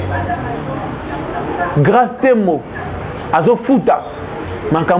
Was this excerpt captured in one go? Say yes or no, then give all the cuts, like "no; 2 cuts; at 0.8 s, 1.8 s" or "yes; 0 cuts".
yes; 0 cuts